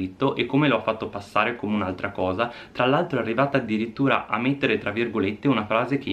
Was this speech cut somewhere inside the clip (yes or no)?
no